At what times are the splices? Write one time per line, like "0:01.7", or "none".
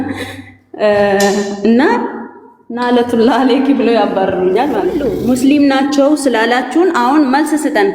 0:05.0